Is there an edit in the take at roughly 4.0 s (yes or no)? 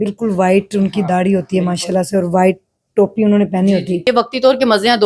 yes